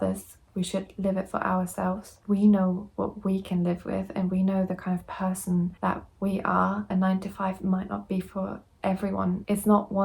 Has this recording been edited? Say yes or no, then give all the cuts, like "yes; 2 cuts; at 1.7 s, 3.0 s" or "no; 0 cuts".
yes; 3 cuts; at 2.2 s, 5.7 s, 6.9 s